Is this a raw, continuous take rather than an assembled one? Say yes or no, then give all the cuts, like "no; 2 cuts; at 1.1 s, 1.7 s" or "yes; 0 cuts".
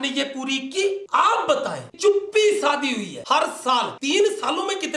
no; 2 cuts; at 1.9 s, 3.2 s